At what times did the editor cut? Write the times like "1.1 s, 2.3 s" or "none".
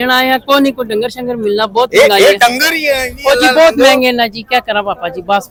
none